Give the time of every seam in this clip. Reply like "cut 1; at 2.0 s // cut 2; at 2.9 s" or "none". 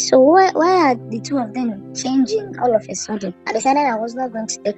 cut 1; at 3.4 s